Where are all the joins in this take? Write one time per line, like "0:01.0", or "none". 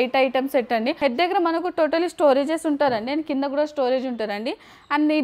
0:01.0